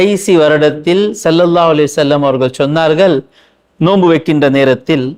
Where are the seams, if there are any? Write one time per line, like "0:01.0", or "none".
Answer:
none